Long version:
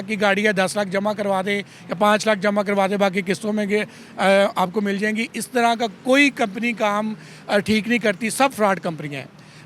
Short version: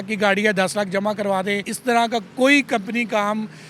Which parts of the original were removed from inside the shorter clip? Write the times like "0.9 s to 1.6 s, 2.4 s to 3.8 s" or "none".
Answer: 1.7 s to 5.4 s